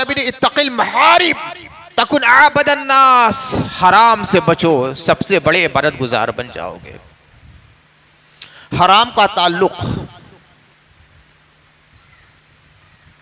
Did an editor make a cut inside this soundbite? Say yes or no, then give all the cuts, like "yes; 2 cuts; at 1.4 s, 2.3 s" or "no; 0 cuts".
no; 0 cuts